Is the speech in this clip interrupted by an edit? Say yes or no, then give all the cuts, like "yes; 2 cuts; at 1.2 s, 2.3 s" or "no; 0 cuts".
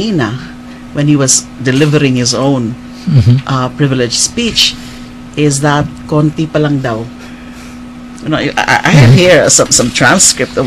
no; 0 cuts